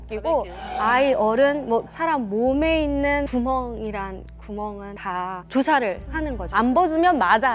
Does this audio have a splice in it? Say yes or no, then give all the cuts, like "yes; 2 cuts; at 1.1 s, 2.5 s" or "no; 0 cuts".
yes; 1 cut; at 6.5 s